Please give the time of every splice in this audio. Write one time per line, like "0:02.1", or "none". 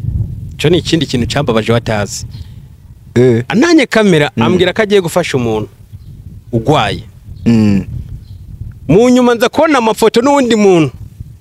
none